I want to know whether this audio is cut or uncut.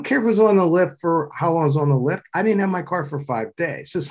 uncut